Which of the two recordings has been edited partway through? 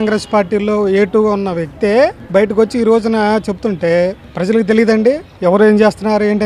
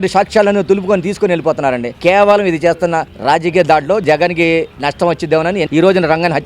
second; 2 cuts; at 4.0 s, 5.7 s

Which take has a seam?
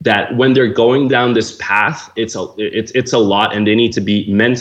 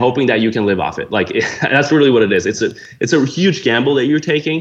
first; 1 cut; at 2.1 s

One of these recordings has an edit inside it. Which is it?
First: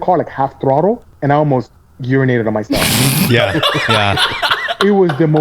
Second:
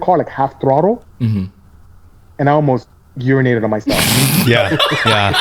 first; 1 cut; at 1.1 s

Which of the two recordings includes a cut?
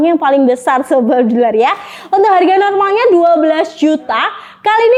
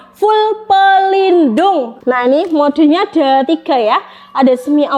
second; 1 cut; at 1.9 s

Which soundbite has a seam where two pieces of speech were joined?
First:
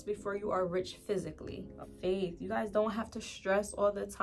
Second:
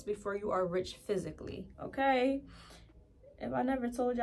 first; 1 cut; at 1.9 s

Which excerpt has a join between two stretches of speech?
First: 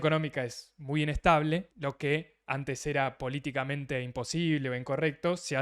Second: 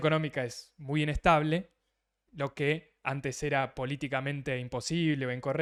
first; 1 cut; at 1.7 s

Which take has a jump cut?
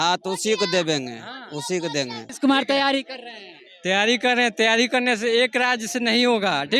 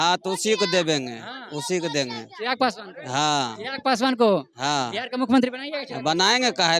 first; 1 cut; at 2.2 s

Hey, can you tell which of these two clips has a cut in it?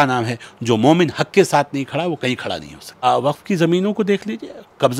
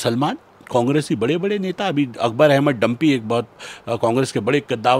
first; 1 cut; at 3.0 s

